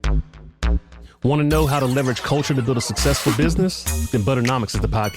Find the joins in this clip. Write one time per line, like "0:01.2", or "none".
0:01.1